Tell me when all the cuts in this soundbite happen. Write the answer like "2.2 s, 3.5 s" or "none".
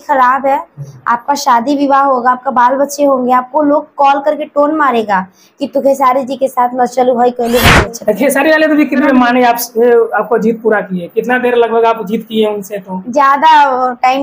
7.8 s, 9.0 s